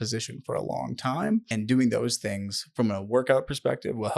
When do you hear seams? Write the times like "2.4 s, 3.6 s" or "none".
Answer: 1.5 s